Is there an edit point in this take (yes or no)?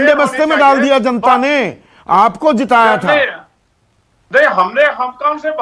no